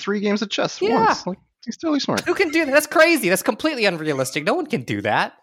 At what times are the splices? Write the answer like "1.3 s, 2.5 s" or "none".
none